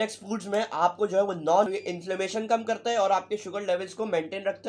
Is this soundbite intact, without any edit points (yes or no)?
no